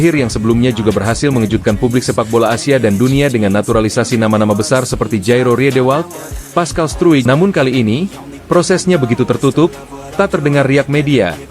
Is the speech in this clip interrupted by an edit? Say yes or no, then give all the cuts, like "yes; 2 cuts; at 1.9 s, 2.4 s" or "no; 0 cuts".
yes; 1 cut; at 7.2 s